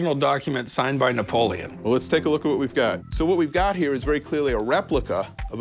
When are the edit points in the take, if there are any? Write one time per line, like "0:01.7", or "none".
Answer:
none

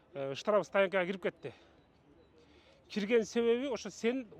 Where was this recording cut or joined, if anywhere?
none

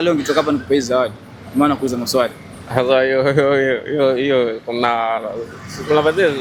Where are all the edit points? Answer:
none

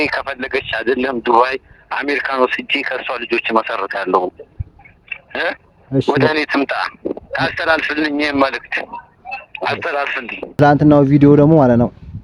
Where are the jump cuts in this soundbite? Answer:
0:10.5

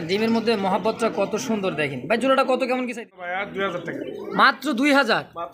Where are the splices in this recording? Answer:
0:02.9

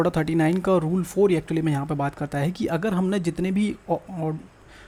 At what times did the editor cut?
none

